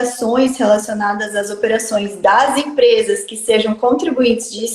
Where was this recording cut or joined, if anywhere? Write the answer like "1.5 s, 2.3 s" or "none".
none